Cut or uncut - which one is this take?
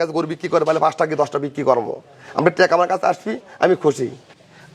uncut